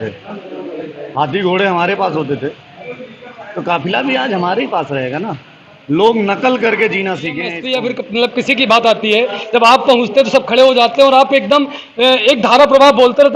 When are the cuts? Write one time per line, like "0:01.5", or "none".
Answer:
0:07.5